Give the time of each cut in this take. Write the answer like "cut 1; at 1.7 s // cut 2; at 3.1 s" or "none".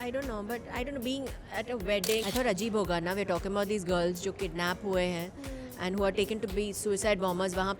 cut 1; at 2.2 s